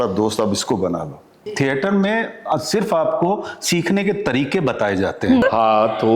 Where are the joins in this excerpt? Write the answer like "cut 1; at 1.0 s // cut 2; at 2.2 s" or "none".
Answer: cut 1; at 1.4 s // cut 2; at 5.4 s